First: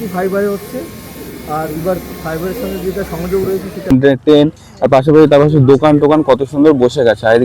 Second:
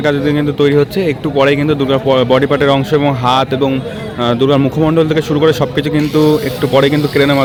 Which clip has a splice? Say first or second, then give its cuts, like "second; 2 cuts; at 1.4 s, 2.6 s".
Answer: first; 1 cut; at 3.9 s